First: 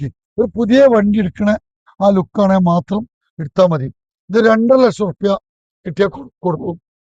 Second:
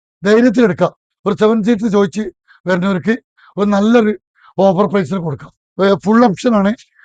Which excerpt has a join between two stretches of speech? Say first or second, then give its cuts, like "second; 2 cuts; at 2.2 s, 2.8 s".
second; 1 cut; at 5.6 s